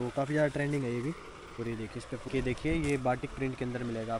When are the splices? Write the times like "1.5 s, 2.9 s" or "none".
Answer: 2.2 s